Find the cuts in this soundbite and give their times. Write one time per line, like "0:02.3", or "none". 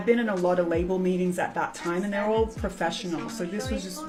none